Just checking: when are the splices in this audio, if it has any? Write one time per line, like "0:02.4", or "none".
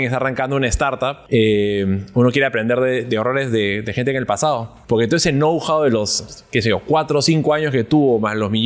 0:01.2
0:04.7